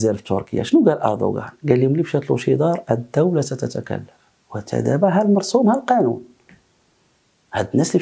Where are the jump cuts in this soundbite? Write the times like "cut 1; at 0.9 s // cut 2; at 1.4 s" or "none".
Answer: none